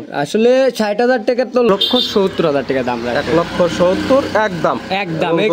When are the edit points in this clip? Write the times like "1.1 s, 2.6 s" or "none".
1.7 s

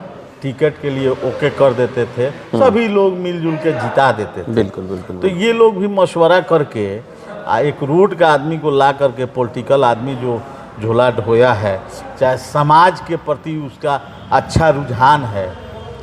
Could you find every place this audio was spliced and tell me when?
none

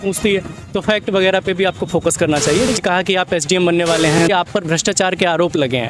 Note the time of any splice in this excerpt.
2.8 s, 4.2 s

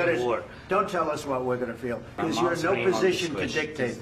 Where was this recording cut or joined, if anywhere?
2.2 s

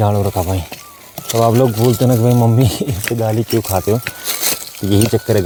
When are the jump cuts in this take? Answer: none

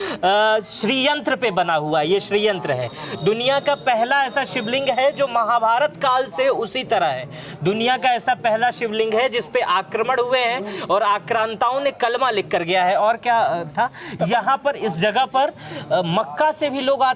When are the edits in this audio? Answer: none

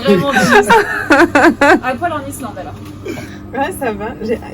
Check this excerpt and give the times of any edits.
3.3 s

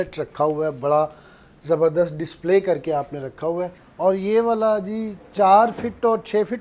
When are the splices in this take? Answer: 3.8 s

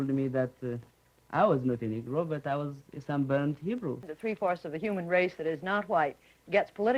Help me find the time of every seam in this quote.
4.1 s

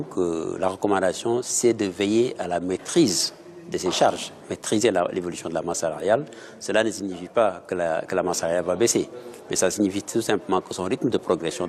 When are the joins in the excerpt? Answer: 5.9 s

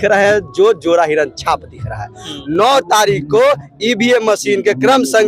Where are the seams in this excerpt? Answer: 2.3 s

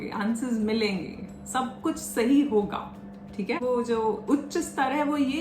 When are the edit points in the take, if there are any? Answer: 3.6 s

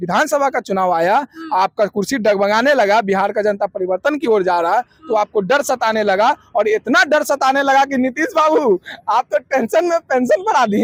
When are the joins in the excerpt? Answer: none

